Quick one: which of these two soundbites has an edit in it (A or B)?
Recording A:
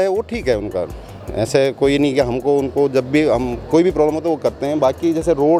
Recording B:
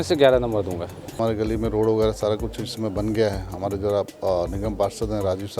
B